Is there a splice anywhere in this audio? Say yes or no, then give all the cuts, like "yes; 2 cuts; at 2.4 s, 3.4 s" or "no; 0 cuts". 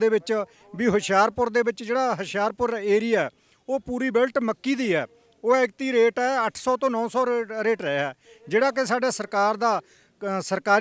no; 0 cuts